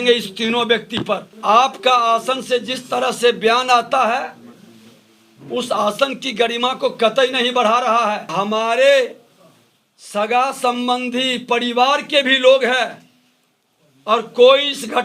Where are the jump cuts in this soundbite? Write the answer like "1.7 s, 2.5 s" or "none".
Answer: 1.3 s, 8.3 s